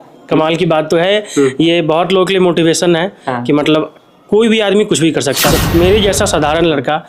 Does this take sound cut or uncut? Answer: cut